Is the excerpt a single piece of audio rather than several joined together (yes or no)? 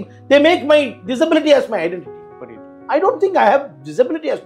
yes